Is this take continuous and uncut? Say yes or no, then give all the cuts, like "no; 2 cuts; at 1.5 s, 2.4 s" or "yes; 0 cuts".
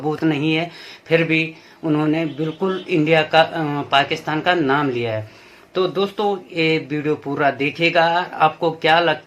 yes; 0 cuts